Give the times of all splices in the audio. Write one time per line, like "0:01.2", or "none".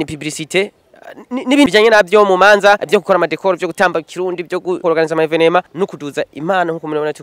0:01.7
0:02.8
0:04.8
0:05.7